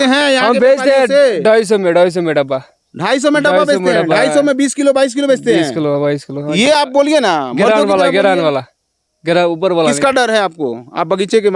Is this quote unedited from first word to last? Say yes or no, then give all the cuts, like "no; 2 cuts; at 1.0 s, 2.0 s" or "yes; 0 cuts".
yes; 0 cuts